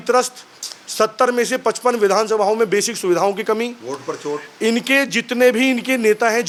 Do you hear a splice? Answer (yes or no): no